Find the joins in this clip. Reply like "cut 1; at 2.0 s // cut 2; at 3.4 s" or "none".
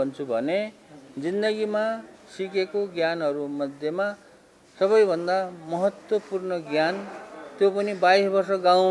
none